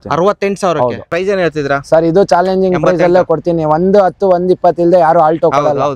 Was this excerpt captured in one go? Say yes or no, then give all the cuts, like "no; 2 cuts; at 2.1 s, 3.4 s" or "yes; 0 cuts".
no; 1 cut; at 1.1 s